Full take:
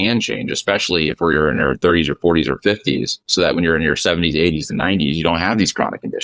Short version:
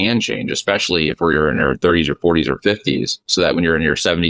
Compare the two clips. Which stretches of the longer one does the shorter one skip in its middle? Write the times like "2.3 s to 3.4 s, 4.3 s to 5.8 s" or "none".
none